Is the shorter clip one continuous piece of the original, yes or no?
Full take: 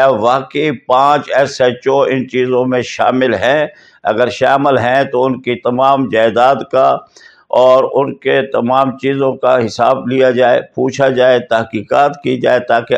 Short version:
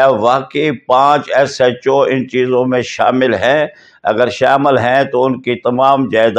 yes